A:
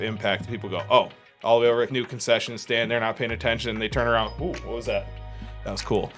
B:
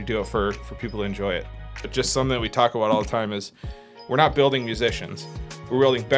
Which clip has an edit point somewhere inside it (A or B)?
B